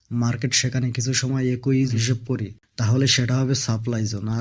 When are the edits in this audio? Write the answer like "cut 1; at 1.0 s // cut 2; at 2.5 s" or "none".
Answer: cut 1; at 1.9 s

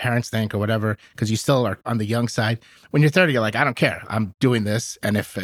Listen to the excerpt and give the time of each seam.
none

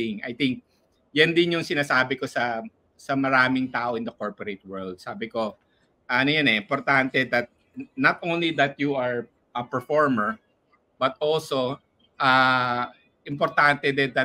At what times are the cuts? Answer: none

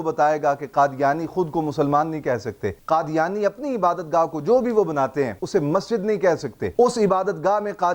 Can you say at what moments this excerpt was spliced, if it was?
cut 1; at 5.4 s

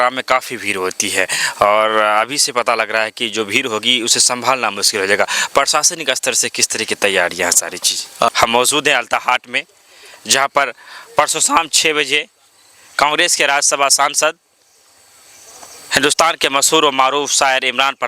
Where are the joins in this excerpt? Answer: cut 1; at 8.3 s

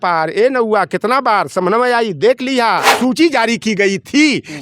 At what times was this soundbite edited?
cut 1; at 3.0 s

